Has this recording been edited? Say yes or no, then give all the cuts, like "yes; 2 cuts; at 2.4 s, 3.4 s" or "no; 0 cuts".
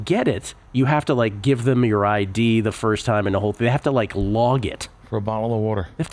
no; 0 cuts